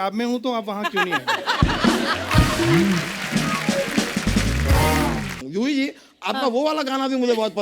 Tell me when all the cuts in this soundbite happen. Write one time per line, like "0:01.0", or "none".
0:05.4

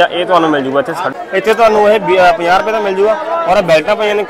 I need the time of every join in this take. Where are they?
0:01.0

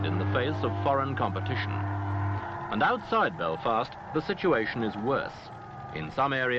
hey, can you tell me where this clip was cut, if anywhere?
0:02.8

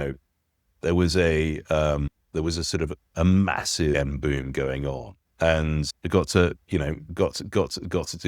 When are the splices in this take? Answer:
0:02.2
0:04.0
0:05.9

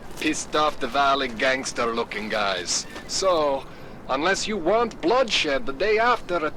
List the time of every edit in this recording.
none

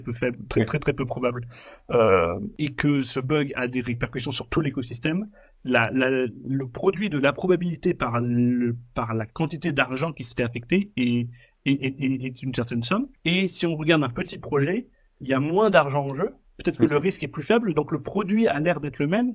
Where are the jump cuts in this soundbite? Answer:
0:02.5
0:13.1

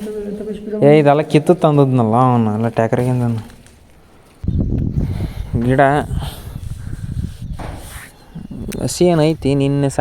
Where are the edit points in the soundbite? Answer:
0:04.5

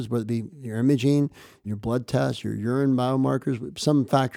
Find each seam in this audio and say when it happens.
0:01.6

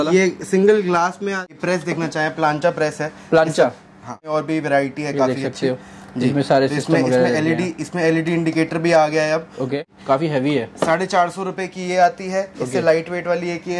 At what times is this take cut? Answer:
0:01.5
0:04.3
0:09.8

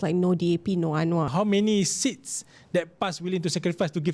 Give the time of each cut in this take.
0:01.3

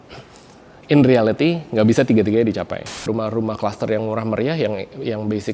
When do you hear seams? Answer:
0:03.0

